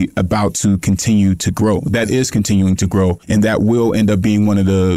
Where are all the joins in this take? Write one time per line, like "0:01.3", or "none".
0:03.2